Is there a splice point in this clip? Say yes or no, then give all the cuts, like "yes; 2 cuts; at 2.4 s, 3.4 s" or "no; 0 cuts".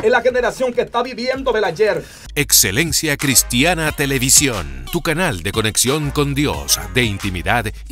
yes; 1 cut; at 2.2 s